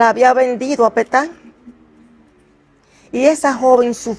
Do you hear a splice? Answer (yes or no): no